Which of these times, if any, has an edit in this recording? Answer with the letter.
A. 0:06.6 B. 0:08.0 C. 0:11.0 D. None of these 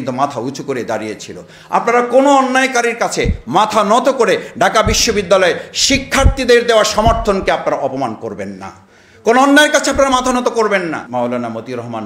C